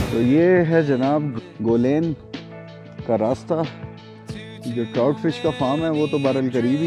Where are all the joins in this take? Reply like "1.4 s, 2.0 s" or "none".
1.3 s

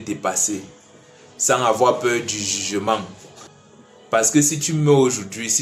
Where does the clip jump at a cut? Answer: none

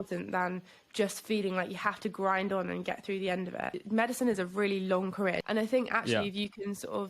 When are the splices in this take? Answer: 3.7 s, 5.4 s

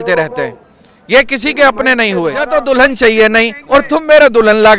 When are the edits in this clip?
2.5 s

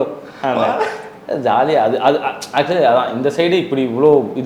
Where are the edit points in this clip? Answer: none

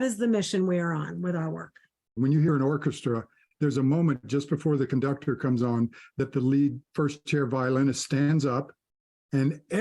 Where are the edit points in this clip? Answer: 2.1 s, 3.4 s

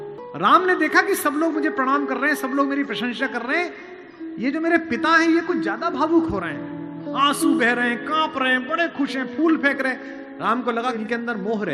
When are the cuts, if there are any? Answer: none

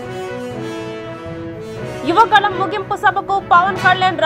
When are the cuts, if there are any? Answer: 1.4 s

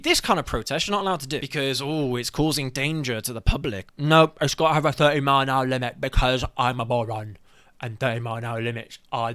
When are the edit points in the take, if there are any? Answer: 1.5 s, 3.8 s

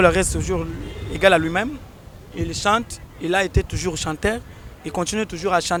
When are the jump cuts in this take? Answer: none

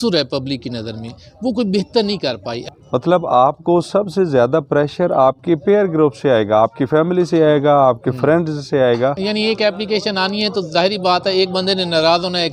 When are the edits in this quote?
2.5 s, 9.2 s

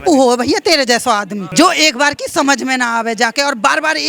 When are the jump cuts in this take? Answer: 1.4 s

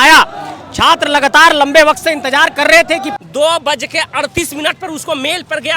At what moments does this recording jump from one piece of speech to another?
3.1 s

